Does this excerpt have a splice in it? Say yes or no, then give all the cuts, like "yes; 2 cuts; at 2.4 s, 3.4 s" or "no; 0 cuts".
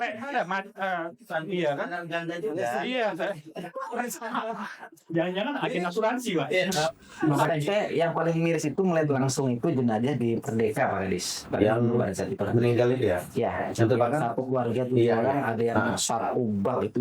yes; 1 cut; at 7.0 s